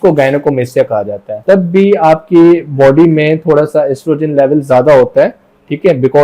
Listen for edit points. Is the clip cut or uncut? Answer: cut